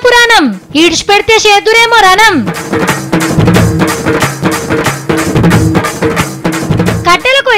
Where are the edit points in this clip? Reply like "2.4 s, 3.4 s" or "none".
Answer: none